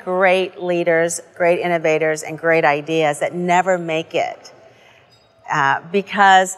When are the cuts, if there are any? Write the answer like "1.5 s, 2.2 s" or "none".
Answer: none